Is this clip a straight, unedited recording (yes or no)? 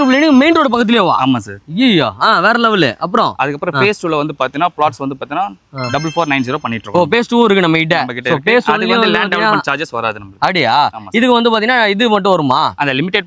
yes